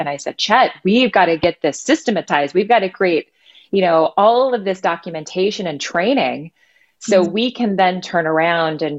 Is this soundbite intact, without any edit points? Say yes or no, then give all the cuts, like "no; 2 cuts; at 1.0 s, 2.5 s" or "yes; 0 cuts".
yes; 0 cuts